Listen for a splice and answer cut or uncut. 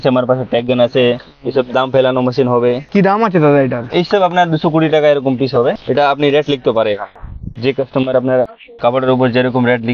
uncut